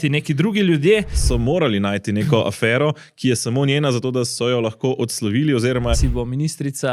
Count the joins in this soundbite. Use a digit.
2